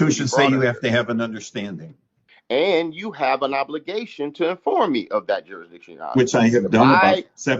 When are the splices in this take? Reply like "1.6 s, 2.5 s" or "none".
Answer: 2.3 s